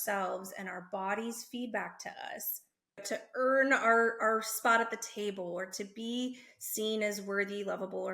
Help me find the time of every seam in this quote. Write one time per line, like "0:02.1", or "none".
0:03.0